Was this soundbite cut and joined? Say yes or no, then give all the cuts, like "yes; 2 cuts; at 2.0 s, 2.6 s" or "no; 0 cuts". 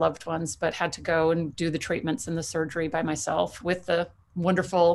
no; 0 cuts